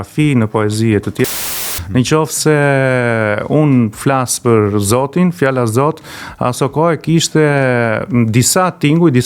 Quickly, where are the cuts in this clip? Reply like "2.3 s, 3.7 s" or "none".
1.4 s